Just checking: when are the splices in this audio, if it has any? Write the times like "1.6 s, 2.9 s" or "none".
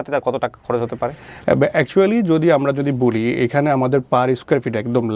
none